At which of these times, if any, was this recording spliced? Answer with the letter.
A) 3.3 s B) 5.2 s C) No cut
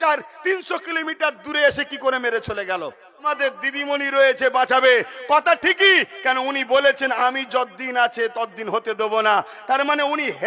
A